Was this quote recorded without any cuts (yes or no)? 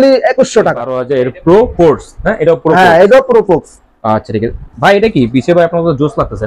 no